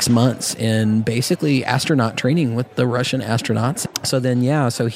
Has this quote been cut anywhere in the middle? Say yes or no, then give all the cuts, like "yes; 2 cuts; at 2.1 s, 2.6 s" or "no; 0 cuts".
yes; 1 cut; at 3.8 s